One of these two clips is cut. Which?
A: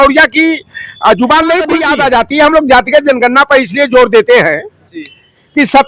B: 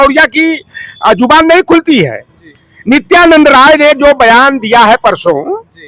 A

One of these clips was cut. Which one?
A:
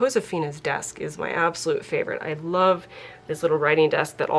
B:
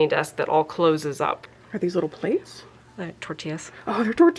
B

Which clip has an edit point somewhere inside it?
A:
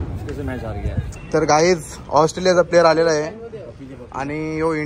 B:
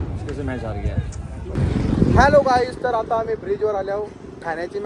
A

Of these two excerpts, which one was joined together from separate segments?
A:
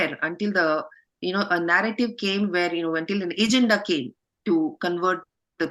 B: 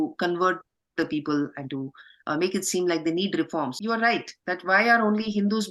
B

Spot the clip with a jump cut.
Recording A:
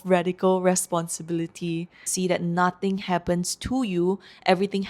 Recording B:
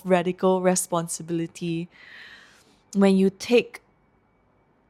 A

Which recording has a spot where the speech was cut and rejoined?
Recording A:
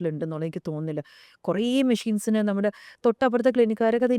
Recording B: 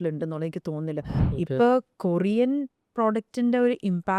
B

